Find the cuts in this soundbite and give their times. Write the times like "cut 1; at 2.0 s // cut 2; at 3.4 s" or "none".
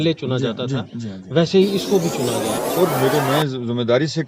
cut 1; at 2.5 s